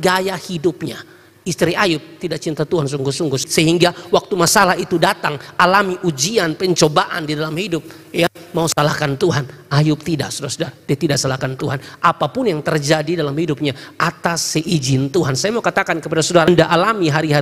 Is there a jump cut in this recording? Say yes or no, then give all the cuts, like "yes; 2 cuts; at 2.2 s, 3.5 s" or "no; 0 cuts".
yes; 1 cut; at 16.5 s